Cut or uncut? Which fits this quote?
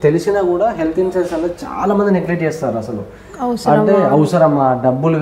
uncut